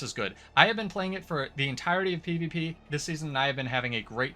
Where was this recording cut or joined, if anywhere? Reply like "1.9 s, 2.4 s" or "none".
2.8 s

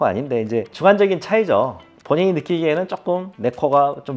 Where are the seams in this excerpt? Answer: none

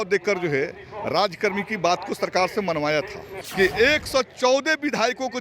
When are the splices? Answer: 3.4 s

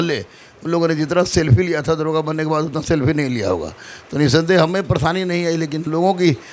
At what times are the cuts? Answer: none

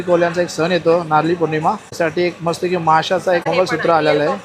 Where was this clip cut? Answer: 1.9 s, 3.4 s

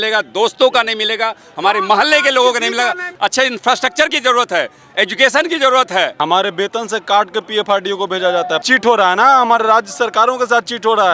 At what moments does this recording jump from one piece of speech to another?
3.1 s, 6.1 s, 8.6 s

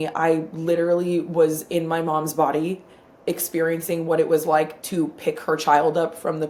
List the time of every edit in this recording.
none

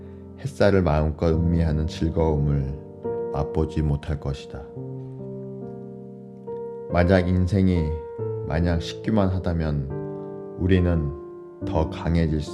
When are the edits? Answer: none

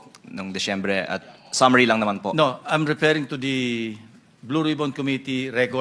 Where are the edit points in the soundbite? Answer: none

